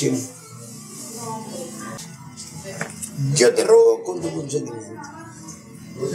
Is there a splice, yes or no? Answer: yes